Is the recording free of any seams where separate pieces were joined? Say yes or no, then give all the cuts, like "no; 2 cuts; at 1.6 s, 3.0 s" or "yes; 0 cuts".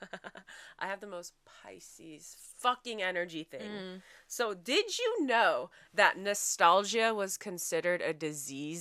yes; 0 cuts